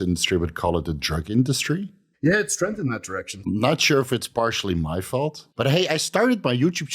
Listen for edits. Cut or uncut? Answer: cut